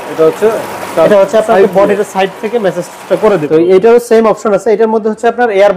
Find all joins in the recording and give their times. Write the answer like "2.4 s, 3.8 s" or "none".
3.4 s